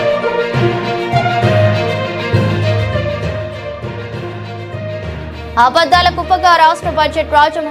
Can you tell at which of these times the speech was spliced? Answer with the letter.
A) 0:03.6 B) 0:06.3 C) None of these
A